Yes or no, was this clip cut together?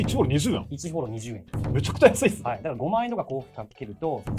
no